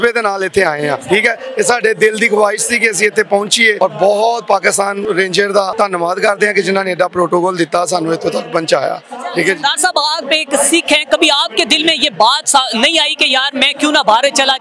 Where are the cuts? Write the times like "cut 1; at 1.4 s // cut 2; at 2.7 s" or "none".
cut 1; at 1.0 s // cut 2; at 3.8 s // cut 3; at 5.0 s // cut 4; at 5.7 s